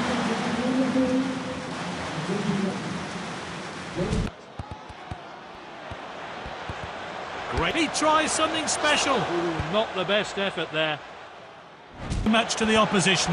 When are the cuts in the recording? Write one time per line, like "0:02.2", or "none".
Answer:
0:04.3
0:12.3